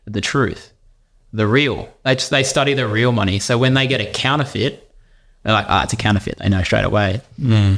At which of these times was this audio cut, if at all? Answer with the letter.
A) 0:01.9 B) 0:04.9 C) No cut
C